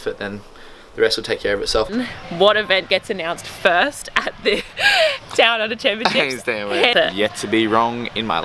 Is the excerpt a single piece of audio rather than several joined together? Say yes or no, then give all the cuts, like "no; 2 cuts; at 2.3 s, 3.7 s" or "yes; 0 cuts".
no; 2 cuts; at 1.9 s, 6.9 s